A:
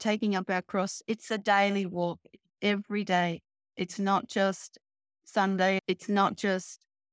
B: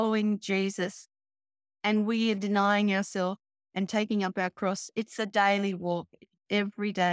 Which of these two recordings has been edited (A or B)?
A